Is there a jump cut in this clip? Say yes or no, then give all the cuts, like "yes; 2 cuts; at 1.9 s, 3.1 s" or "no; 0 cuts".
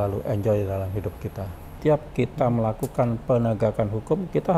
yes; 1 cut; at 1.7 s